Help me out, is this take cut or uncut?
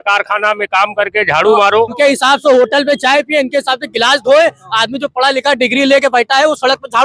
cut